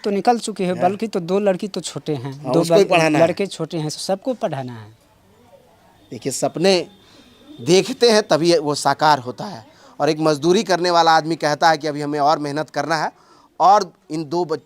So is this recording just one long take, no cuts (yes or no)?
yes